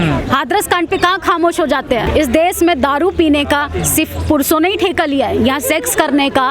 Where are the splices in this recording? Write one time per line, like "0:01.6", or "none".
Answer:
0:02.1